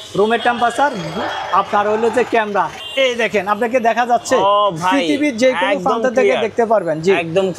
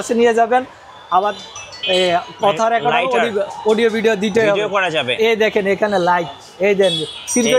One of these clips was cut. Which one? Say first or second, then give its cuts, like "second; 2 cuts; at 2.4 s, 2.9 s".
first; 1 cut; at 2.8 s